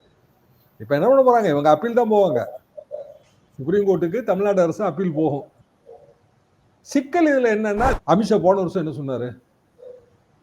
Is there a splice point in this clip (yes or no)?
yes